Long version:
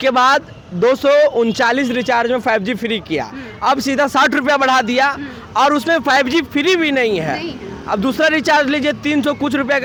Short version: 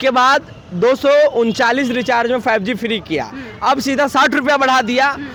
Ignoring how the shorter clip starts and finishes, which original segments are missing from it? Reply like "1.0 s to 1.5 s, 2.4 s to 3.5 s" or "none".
none